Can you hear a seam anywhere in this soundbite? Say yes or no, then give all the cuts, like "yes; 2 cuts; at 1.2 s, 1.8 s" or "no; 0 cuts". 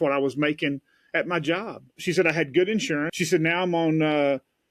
yes; 2 cuts; at 1.9 s, 3.1 s